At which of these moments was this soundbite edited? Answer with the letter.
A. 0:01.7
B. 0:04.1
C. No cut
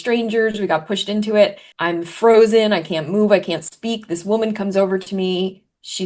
A